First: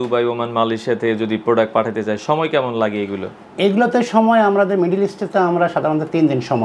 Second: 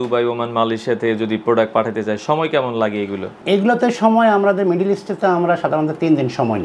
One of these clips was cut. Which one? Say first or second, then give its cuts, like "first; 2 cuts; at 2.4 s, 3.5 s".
second; 1 cut; at 3.3 s